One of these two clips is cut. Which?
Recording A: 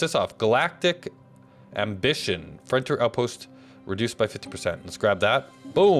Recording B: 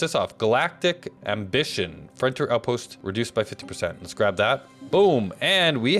B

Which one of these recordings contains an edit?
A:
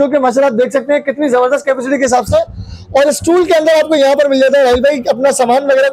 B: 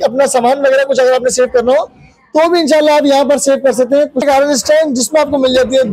B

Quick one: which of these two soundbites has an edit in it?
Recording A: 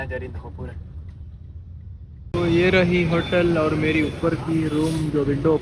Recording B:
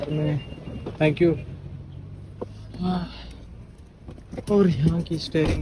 A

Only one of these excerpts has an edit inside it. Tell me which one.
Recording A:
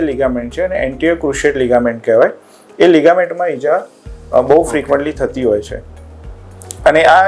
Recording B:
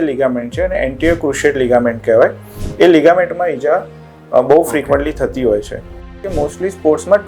B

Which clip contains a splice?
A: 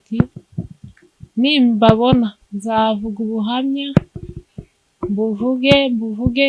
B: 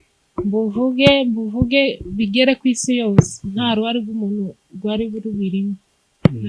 B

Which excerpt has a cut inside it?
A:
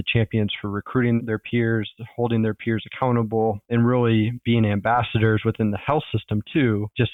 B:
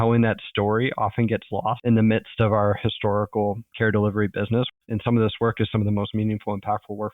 B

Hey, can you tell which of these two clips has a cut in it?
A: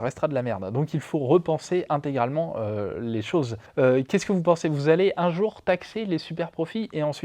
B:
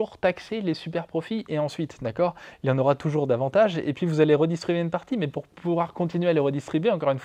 A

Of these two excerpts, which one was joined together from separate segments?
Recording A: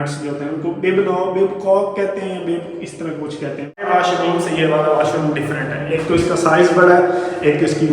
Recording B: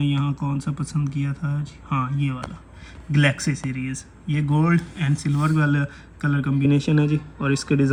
A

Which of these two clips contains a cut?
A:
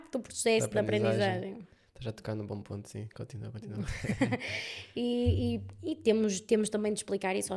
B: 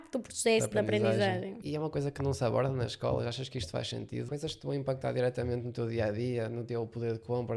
B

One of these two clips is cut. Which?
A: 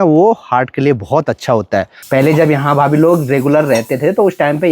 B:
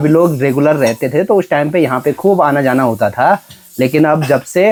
A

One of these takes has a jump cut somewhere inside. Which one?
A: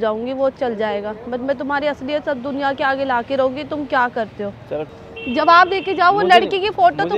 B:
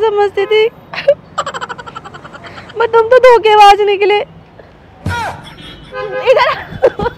A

